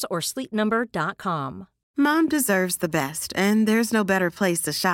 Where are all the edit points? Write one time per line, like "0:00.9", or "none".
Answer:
0:01.8